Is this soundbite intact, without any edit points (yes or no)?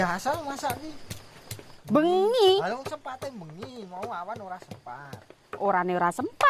yes